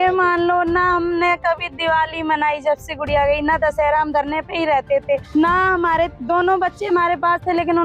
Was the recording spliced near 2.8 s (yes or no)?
no